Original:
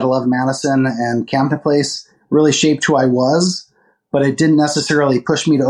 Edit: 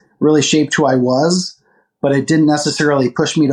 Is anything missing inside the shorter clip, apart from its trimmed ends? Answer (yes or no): no